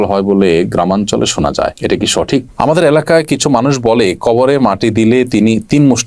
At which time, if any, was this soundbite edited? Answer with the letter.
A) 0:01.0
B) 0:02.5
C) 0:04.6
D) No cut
B